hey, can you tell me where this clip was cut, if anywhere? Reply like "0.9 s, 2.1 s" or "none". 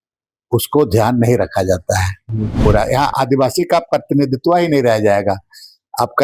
2.6 s